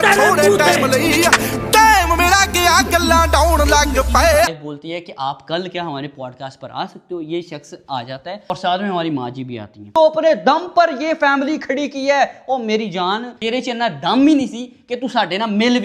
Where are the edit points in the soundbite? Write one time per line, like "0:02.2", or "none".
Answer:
0:04.5
0:09.9